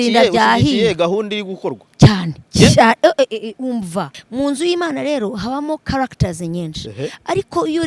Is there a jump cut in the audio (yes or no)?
yes